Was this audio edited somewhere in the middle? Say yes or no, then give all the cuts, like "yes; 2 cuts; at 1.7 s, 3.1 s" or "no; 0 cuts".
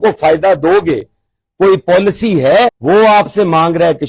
yes; 1 cut; at 2.8 s